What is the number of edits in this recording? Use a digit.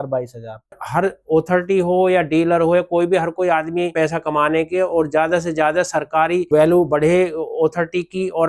3